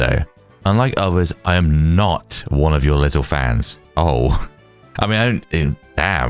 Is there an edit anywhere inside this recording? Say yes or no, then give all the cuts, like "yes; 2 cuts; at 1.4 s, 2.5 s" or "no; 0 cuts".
yes; 1 cut; at 3.8 s